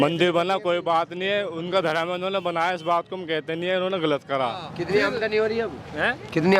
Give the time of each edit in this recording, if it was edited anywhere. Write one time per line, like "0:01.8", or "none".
0:04.7